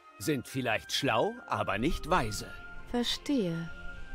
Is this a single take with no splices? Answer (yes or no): yes